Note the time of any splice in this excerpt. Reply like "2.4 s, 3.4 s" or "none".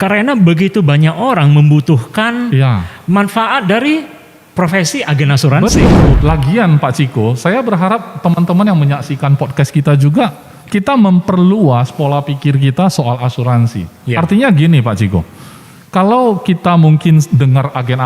6.1 s